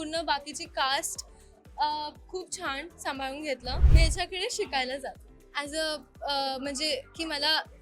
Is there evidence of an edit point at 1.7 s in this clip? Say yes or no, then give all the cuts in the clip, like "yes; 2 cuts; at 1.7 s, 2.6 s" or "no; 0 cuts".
no; 1 cut; at 3.8 s